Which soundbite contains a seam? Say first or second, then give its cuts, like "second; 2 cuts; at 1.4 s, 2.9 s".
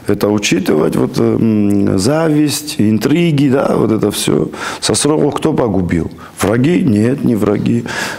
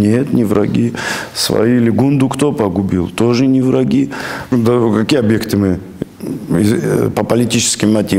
second; 1 cut; at 4.3 s